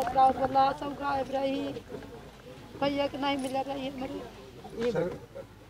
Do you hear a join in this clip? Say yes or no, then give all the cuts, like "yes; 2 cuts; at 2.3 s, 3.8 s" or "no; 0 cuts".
yes; 1 cut; at 4.7 s